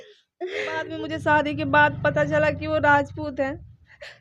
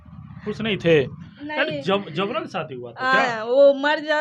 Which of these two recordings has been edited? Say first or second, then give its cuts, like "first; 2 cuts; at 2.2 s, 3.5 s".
first; 1 cut; at 1.0 s